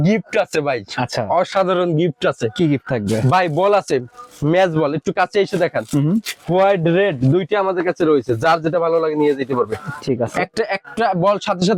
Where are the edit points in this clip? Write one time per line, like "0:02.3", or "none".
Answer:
none